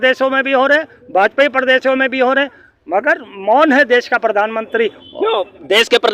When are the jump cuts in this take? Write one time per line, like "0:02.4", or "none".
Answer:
none